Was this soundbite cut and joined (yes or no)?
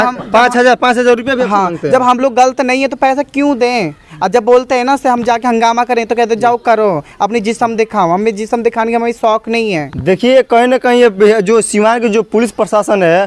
no